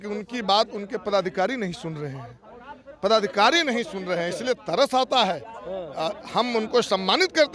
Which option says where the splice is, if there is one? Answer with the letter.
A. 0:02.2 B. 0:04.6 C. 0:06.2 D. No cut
D